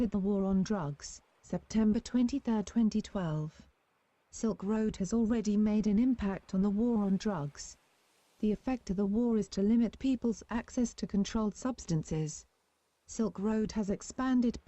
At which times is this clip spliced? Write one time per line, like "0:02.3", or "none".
0:01.1